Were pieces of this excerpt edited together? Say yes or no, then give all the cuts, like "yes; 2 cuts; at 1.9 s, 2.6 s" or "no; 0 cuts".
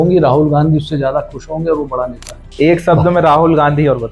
yes; 1 cut; at 2.4 s